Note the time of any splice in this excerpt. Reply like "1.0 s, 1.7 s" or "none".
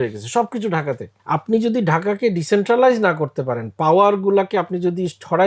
1.1 s

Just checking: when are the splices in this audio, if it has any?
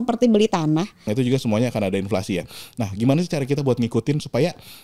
1.1 s

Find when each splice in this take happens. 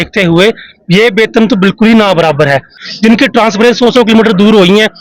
2.8 s

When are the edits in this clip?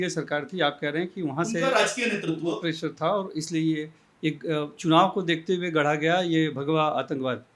none

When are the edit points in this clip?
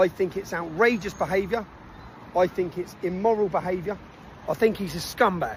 none

